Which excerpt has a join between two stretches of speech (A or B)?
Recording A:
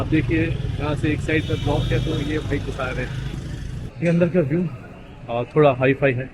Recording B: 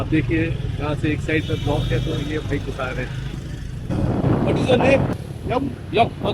A